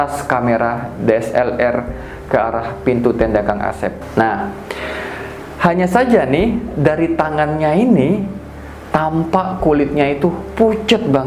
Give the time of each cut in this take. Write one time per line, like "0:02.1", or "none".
0:04.0